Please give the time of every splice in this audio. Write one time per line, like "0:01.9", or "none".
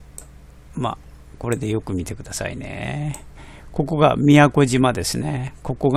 none